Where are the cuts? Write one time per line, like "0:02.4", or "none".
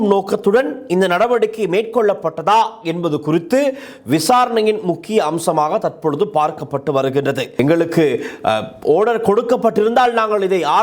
0:07.5